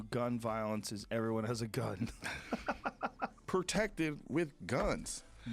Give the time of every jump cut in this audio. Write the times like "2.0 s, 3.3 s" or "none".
3.4 s